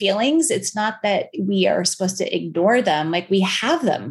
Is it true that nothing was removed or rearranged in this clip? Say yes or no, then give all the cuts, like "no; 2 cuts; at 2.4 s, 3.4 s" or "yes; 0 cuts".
yes; 0 cuts